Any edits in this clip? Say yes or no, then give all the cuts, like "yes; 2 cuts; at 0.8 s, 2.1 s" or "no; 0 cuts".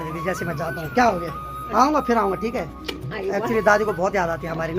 no; 0 cuts